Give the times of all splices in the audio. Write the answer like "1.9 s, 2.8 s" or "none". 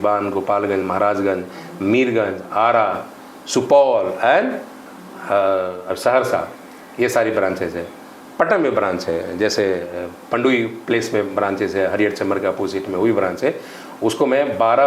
none